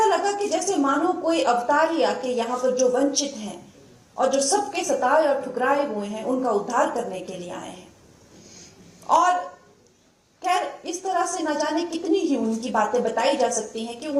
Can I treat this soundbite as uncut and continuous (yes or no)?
yes